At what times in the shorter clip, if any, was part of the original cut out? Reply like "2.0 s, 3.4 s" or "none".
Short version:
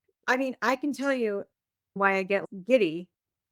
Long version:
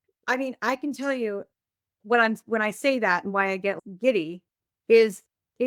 1.9 s